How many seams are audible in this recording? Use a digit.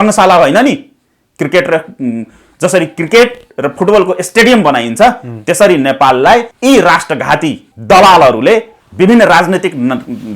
3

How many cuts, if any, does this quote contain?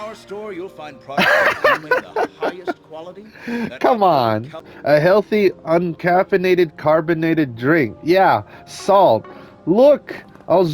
1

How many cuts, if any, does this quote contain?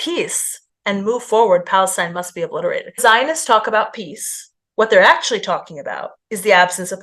1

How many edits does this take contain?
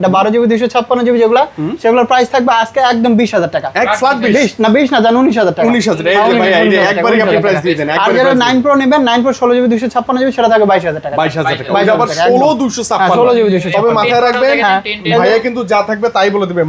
0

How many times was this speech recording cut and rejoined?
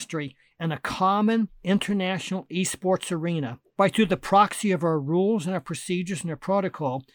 2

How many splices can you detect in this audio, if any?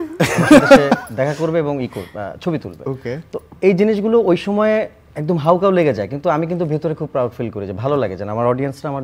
0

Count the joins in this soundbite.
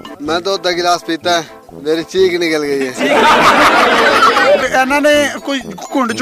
1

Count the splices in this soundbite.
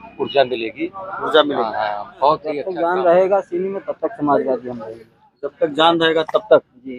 1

